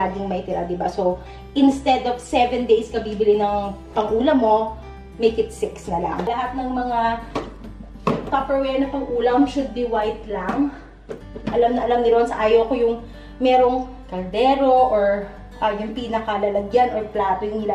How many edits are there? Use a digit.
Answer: 1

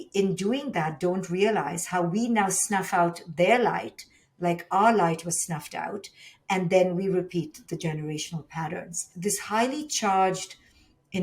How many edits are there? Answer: 1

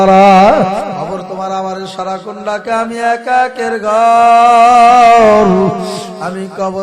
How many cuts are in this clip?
1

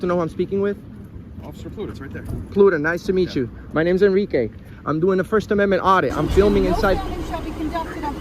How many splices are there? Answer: 1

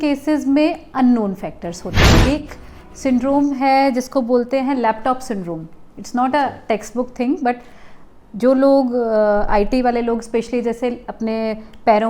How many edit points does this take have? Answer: 1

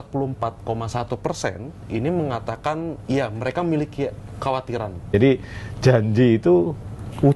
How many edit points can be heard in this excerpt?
1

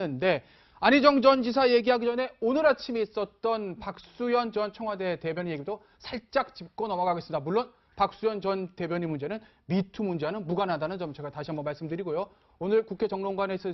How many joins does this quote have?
0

